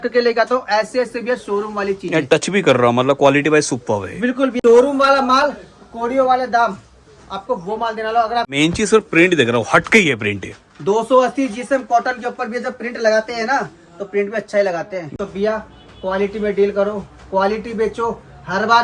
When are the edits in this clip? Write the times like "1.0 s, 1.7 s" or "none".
4.5 s, 8.5 s, 15.1 s